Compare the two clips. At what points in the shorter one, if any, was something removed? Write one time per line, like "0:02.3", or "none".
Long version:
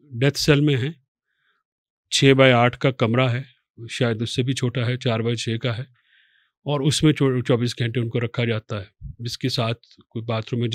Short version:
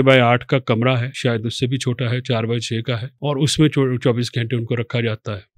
0:01.1
0:03.1

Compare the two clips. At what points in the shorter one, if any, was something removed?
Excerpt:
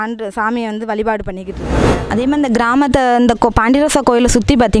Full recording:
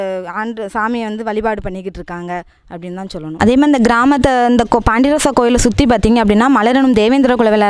0:02.0

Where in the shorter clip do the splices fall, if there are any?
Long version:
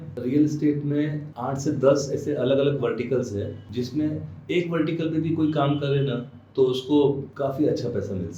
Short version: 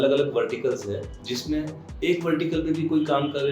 none

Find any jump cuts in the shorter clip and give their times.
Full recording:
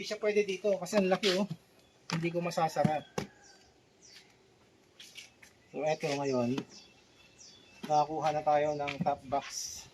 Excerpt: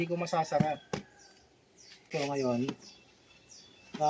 0:02.1

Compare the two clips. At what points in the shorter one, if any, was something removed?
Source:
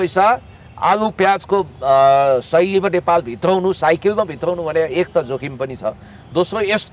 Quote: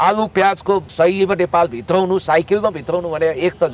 0:00.9

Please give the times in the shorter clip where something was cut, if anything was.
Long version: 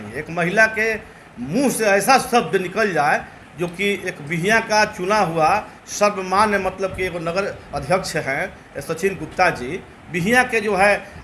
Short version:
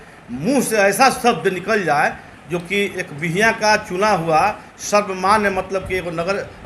none

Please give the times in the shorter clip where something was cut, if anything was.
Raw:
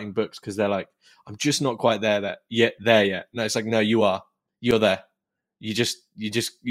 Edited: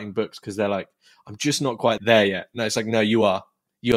0:02.0

